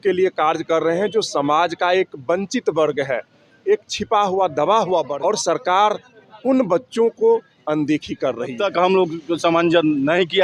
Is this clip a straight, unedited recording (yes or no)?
no